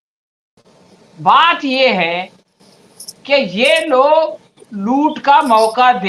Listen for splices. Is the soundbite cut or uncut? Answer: uncut